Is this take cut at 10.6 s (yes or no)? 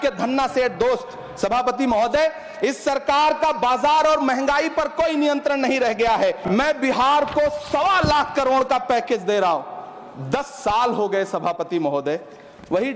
no